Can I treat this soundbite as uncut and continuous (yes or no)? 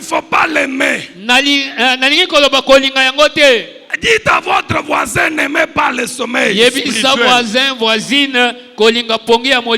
yes